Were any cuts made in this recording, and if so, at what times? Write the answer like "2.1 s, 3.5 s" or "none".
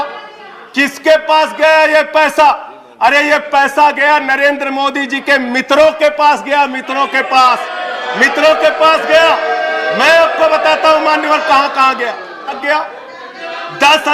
12.6 s